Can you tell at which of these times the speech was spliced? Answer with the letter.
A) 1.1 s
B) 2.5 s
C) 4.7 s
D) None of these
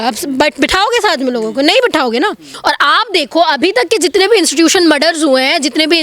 B